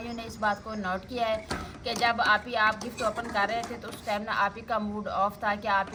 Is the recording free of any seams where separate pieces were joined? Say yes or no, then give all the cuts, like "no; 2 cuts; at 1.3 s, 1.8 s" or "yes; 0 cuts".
yes; 0 cuts